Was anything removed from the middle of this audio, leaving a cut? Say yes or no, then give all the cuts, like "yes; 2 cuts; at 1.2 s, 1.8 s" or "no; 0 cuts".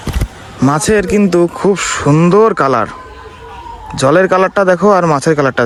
no; 0 cuts